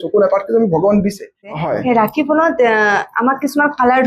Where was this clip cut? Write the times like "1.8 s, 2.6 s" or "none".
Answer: 1.4 s